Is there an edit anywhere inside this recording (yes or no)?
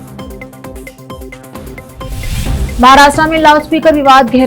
yes